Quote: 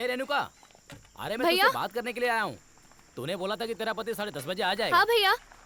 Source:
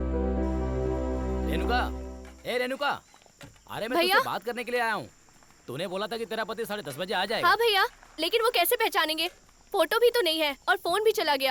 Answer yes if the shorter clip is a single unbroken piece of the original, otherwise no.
yes